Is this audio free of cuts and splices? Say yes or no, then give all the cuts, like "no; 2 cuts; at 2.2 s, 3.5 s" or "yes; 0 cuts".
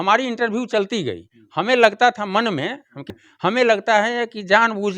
no; 1 cut; at 3.1 s